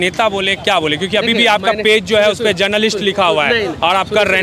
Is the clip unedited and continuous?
yes; 0 cuts

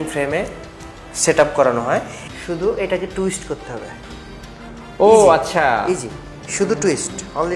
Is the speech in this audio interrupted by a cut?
yes; 1 cut; at 2.2 s

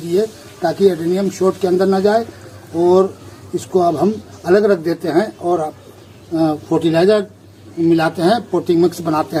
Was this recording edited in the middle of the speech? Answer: no; 0 cuts

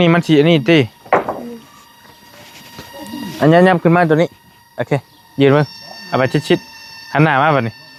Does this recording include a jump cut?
no; 0 cuts

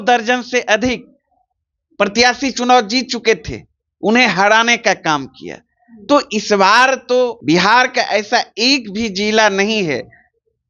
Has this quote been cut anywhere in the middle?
yes; 1 cut; at 7.4 s

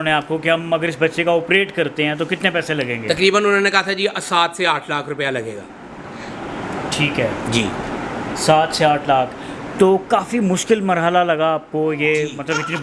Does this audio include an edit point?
no; 0 cuts

